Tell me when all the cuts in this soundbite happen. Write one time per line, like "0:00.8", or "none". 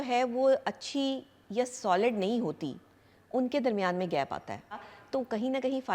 0:04.9